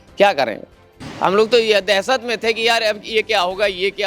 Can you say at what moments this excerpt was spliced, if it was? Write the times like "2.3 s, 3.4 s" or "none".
1.0 s